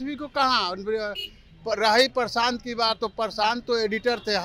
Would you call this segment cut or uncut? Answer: uncut